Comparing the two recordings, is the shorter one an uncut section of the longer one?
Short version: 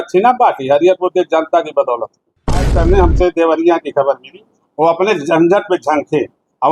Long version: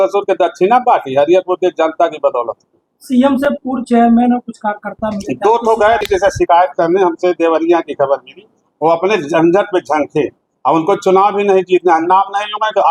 no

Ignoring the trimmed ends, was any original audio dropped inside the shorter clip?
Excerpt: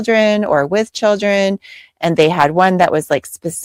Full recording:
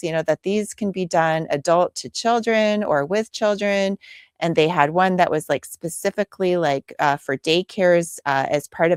no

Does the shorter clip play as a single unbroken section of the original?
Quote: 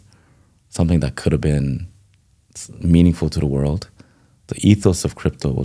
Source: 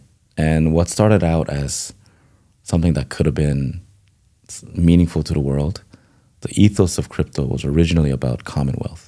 yes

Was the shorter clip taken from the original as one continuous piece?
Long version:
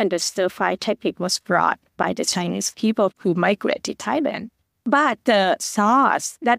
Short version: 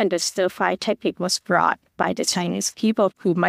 yes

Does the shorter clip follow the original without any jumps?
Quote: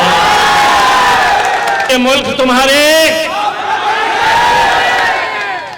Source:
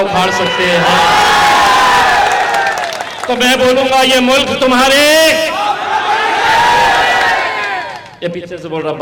no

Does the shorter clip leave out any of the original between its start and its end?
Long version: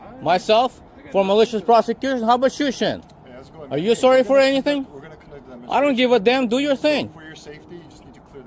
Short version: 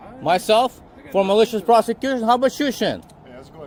no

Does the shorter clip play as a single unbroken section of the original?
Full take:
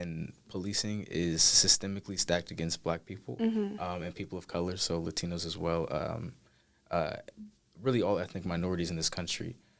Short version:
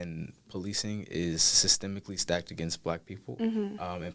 yes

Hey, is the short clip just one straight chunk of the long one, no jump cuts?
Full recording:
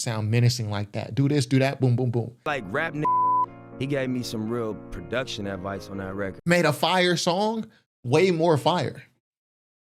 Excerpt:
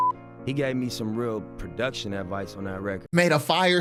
yes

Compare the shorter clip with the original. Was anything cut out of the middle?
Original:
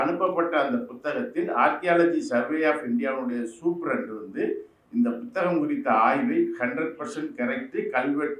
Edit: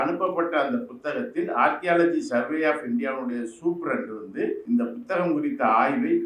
yes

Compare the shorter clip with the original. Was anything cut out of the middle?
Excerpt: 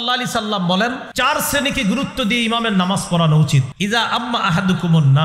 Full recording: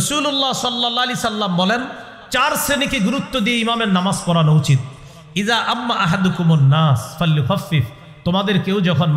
yes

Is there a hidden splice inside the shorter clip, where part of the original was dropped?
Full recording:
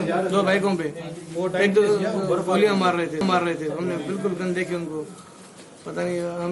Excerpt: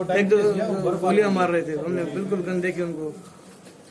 yes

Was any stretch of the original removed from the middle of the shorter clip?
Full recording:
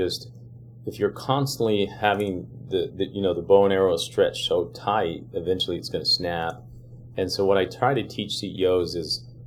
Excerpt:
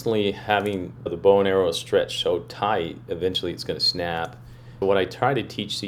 yes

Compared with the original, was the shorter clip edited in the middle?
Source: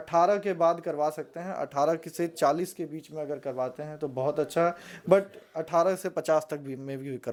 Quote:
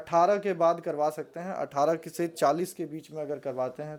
no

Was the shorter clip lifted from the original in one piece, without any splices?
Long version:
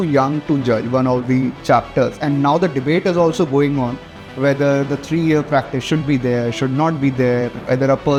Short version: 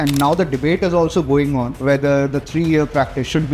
no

